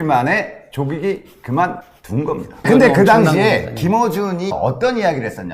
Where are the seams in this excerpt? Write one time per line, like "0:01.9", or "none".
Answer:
0:02.7